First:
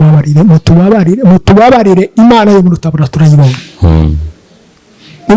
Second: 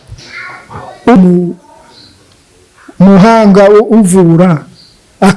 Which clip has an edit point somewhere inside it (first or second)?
second